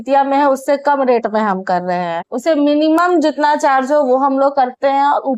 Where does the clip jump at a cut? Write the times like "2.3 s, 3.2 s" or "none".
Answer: 2.2 s